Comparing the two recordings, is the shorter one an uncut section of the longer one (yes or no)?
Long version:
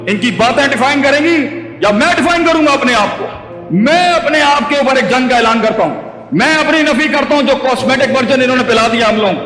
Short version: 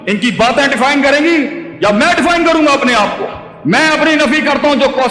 no